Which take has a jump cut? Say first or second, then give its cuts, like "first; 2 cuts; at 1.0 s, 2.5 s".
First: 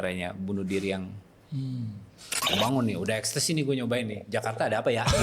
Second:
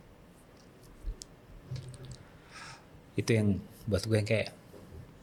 first; 1 cut; at 2.5 s